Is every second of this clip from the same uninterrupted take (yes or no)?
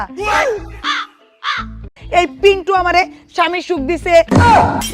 no